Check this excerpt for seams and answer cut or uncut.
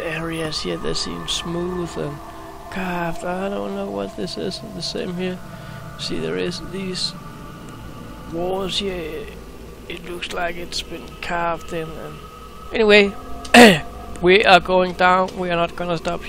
cut